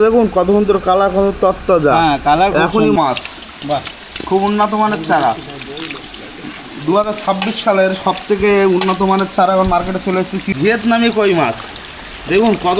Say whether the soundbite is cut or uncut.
cut